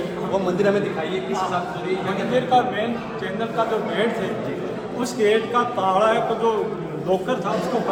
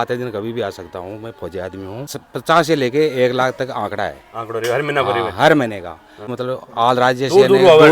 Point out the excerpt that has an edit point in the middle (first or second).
second